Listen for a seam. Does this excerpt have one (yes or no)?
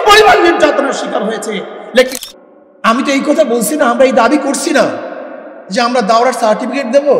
yes